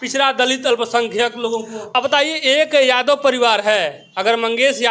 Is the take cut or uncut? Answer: uncut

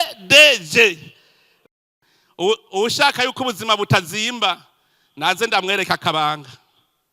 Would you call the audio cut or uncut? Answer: cut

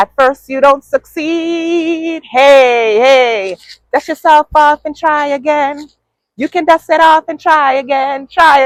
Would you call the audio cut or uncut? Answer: uncut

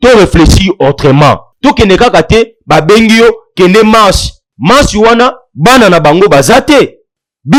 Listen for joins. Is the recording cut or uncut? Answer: uncut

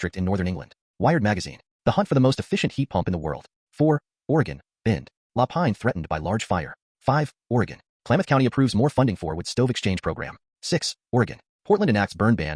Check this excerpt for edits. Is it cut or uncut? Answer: cut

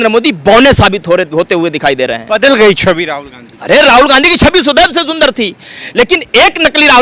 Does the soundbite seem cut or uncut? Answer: uncut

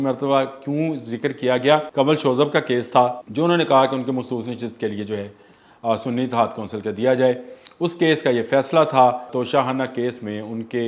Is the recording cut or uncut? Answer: cut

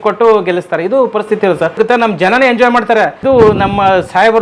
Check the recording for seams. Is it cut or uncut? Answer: cut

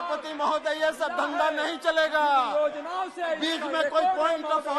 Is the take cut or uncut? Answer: uncut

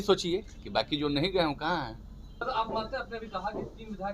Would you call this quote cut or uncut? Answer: cut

